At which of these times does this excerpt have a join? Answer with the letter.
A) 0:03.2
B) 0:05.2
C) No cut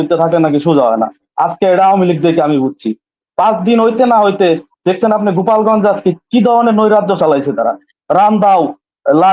C